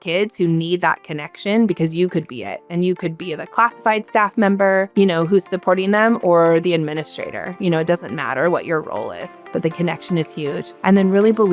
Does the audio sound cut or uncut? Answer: uncut